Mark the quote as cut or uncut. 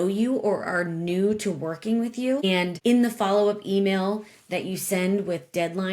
cut